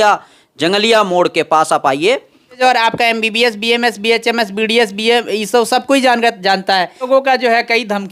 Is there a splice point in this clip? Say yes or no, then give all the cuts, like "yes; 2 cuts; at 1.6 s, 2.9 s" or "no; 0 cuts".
yes; 2 cuts; at 2.6 s, 7.1 s